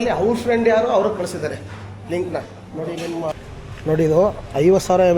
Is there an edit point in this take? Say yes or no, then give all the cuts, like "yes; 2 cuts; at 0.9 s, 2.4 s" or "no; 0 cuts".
yes; 1 cut; at 3.3 s